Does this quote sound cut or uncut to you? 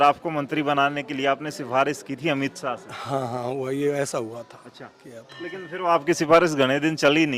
uncut